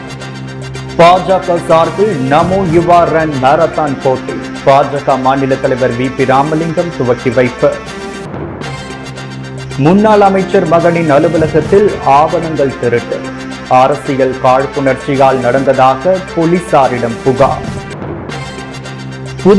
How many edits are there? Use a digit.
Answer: 1